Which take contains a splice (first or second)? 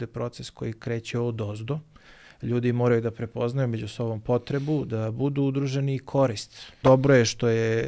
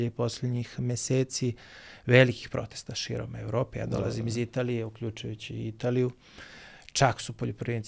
first